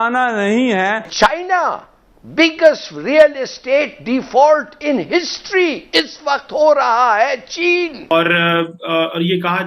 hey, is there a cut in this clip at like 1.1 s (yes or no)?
yes